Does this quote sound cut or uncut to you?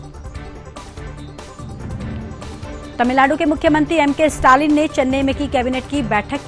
uncut